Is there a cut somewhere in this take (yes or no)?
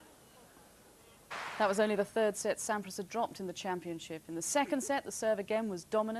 no